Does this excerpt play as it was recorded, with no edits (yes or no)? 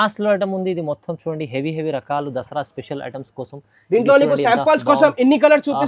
yes